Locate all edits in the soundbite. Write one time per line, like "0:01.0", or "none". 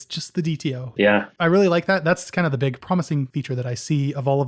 0:00.9
0:03.3